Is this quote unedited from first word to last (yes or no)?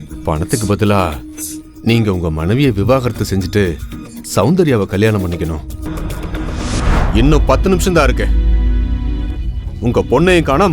no